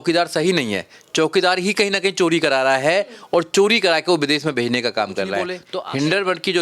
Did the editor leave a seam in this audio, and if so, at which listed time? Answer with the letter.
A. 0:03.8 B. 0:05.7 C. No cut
B